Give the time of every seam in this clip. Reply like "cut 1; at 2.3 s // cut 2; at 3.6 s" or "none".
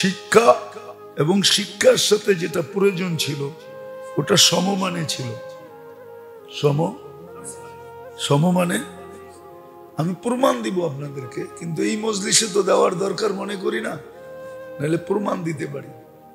none